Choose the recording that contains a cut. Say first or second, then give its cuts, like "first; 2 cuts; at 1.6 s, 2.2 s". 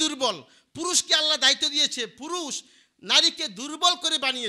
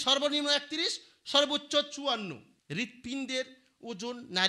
second; 1 cut; at 2.5 s